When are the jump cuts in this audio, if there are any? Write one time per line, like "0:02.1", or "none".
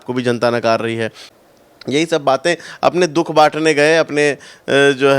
0:01.3